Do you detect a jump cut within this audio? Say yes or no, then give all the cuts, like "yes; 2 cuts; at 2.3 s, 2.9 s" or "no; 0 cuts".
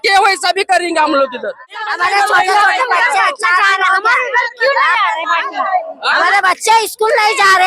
yes; 1 cut; at 1.8 s